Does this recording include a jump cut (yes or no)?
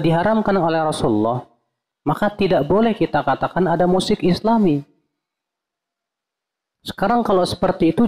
no